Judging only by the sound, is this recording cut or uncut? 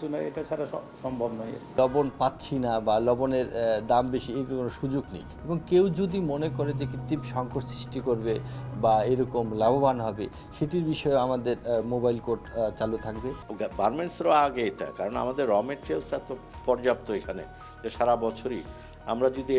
cut